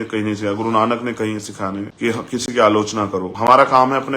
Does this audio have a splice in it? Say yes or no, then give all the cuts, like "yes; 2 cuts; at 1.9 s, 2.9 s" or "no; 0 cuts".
yes; 2 cuts; at 1.9 s, 3.3 s